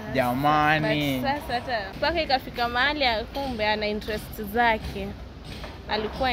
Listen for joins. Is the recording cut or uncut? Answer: cut